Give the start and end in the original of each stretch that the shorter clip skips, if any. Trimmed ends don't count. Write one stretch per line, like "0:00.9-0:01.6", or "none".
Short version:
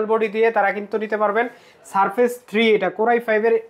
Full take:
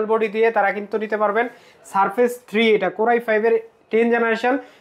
none